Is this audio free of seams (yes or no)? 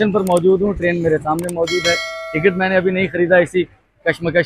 yes